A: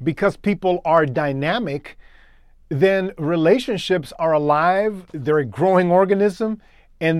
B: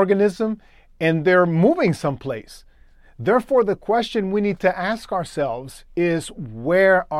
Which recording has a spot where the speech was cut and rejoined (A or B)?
A